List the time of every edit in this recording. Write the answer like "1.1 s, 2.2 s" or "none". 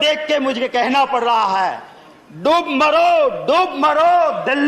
none

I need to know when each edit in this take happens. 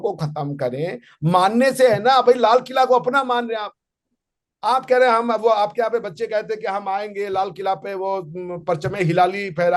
none

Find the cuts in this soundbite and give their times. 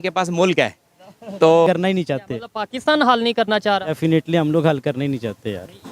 1.7 s

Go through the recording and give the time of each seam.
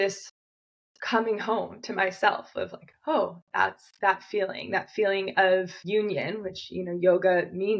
5.8 s

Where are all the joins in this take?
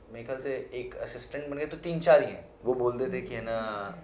2.4 s

